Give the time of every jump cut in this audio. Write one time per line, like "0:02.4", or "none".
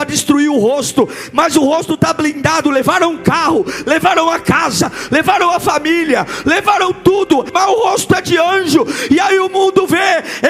0:07.5